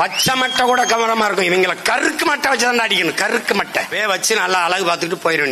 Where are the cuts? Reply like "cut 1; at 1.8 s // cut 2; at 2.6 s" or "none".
cut 1; at 3.9 s